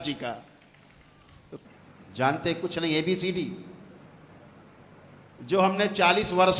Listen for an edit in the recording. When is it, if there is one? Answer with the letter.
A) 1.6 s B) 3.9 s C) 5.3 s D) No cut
A